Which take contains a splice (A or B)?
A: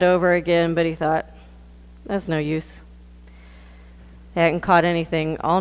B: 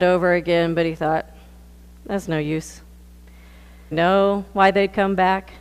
A